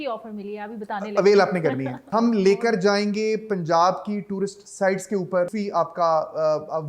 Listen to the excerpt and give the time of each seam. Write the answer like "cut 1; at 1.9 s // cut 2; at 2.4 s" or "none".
cut 1; at 1.9 s // cut 2; at 5.5 s